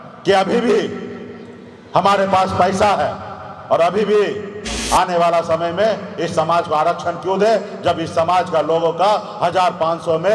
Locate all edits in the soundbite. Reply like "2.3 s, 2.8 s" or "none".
none